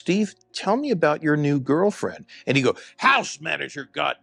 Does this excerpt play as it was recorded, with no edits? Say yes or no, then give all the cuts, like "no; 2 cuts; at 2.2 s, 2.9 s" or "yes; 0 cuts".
yes; 0 cuts